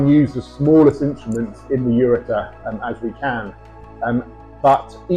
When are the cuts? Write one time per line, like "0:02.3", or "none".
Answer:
none

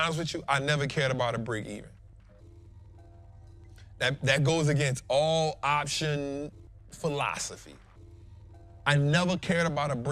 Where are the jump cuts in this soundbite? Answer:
none

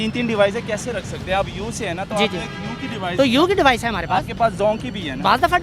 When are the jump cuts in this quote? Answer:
none

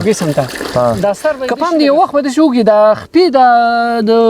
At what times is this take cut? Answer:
0:01.5

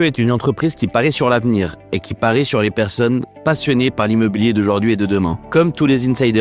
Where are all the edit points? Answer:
0:05.4

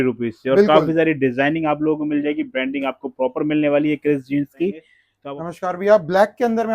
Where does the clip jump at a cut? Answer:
0:05.2

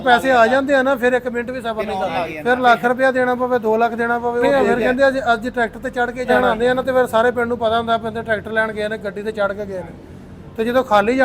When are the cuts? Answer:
0:02.0
0:04.4
0:06.3

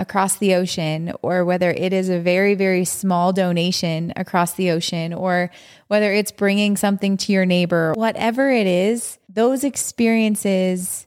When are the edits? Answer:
0:07.9
0:09.2

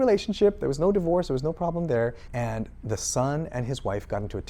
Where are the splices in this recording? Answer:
0:02.2

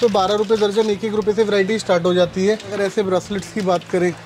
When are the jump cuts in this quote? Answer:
0:02.7

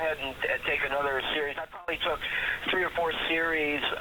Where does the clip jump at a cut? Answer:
0:01.9

